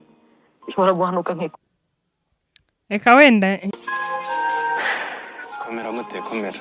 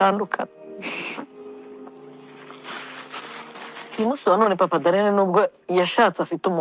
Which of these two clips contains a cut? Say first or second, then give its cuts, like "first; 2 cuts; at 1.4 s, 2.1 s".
first; 1 cut; at 3.8 s